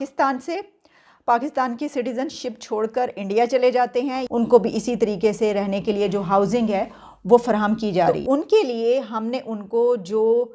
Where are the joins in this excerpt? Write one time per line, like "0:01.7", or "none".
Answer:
0:04.2
0:08.1

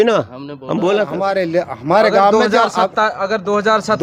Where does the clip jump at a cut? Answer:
0:01.2

